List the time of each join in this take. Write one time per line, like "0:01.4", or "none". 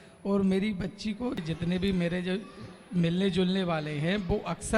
0:01.4